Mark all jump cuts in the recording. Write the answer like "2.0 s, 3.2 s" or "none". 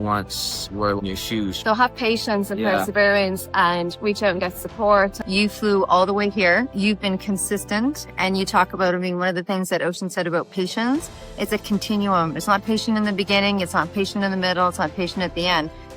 1.0 s, 5.2 s, 6.7 s